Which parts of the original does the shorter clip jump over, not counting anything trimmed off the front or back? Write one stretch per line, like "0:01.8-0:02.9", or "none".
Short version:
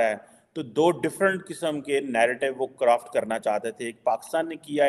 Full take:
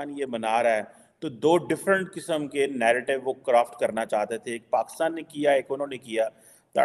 none